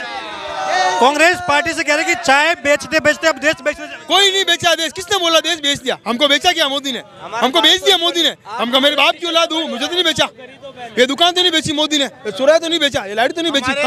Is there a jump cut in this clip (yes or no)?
no